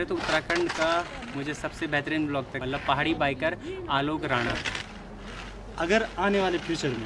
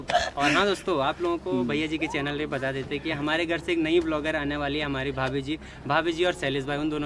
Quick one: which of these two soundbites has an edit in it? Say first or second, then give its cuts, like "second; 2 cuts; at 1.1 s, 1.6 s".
first; 2 cuts; at 2.6 s, 4.7 s